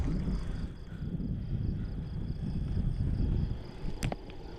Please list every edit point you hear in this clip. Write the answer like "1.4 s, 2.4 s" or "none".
none